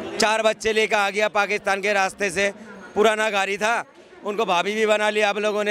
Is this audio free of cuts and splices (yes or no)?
yes